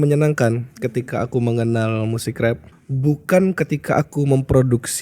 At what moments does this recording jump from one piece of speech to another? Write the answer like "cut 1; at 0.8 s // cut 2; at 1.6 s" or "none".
cut 1; at 2.7 s